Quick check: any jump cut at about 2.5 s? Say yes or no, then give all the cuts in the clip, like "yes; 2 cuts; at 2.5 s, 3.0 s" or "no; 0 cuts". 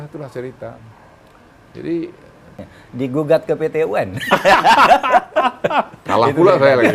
yes; 1 cut; at 2.5 s